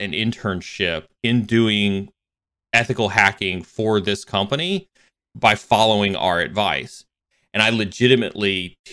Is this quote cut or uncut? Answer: cut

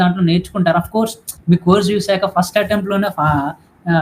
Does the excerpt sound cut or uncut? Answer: cut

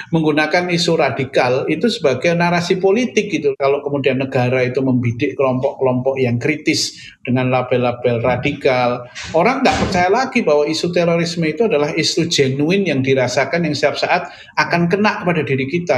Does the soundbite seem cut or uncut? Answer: cut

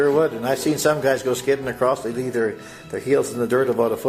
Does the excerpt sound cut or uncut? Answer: uncut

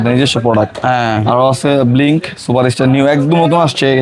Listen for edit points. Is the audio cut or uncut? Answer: uncut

